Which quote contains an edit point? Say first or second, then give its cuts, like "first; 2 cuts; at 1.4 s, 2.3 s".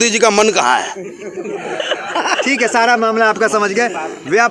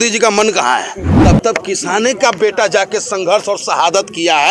second; 1 cut; at 1.0 s